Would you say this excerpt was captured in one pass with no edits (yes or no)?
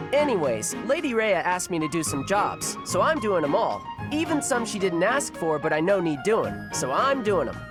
yes